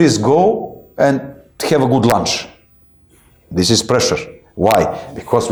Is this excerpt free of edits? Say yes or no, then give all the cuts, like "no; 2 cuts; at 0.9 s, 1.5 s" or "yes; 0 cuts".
yes; 0 cuts